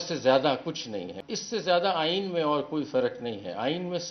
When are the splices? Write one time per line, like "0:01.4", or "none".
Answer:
0:01.2